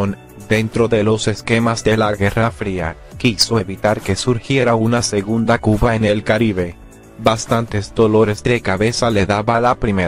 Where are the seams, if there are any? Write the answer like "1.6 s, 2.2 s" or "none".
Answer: none